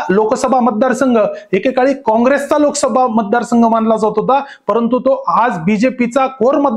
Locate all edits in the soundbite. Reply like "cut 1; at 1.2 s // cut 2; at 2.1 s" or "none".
none